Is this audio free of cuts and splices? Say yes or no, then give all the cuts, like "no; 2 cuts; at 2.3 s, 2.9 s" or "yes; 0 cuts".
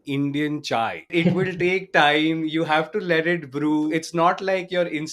no; 2 cuts; at 1.1 s, 3.9 s